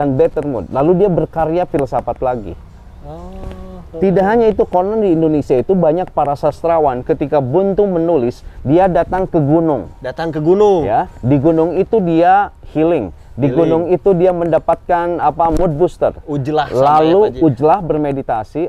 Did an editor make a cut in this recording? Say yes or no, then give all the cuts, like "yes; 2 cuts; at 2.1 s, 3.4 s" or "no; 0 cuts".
no; 0 cuts